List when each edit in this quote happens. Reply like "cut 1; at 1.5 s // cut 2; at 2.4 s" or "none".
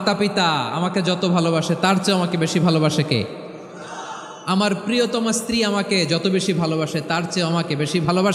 none